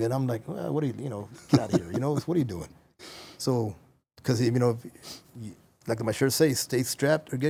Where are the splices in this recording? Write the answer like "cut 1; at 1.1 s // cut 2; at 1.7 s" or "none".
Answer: none

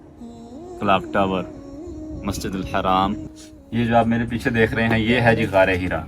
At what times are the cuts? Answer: cut 1; at 3.3 s

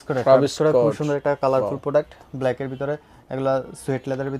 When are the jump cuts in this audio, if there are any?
none

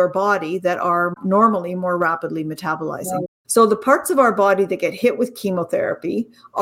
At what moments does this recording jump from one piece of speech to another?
cut 1; at 1.1 s // cut 2; at 3.3 s

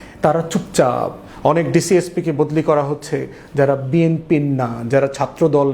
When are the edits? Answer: cut 1; at 1.2 s

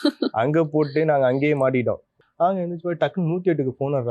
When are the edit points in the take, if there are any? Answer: cut 1; at 2.1 s

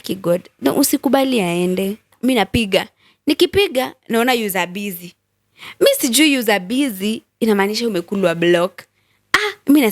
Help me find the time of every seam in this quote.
cut 1; at 2.1 s

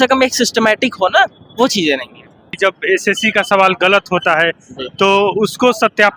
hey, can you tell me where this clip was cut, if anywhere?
cut 1; at 2.6 s

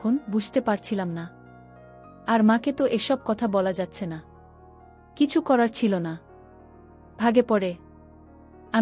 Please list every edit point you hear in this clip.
cut 1; at 3.7 s

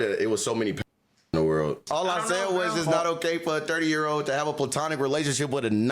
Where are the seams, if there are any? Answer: cut 1; at 1.8 s

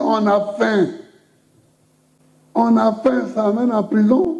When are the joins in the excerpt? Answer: cut 1; at 2.2 s

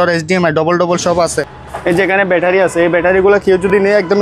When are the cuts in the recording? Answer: cut 1; at 1.5 s

